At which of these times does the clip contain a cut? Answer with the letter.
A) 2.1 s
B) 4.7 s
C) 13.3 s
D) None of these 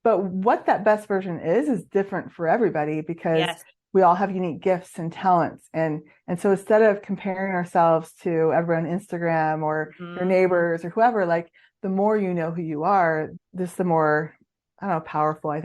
C